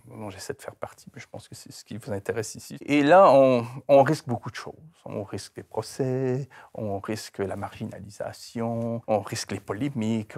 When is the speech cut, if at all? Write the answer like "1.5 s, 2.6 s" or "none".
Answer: 2.7 s, 9.0 s